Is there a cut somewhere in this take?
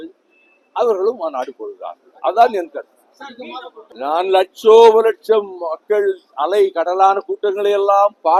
no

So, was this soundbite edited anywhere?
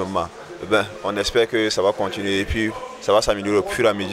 no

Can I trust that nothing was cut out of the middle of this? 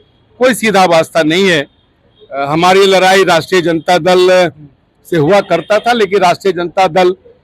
yes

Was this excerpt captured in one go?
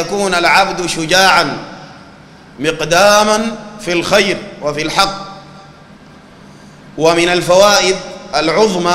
yes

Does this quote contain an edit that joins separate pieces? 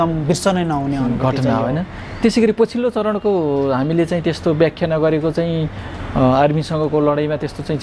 no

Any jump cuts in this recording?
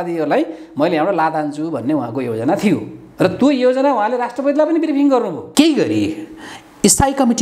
yes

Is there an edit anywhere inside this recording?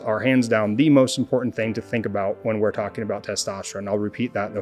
no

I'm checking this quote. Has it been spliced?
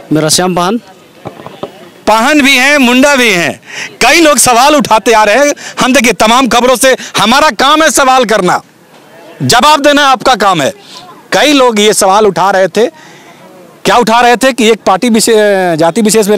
no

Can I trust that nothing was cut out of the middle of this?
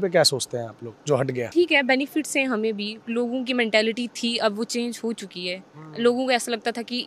no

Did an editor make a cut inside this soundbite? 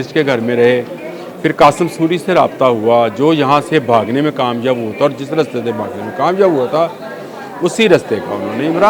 no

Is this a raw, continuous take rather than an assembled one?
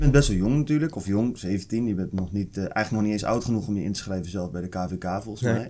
yes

